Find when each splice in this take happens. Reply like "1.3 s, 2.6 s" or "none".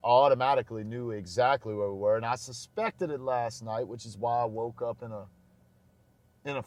none